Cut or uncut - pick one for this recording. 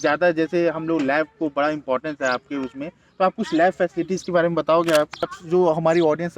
cut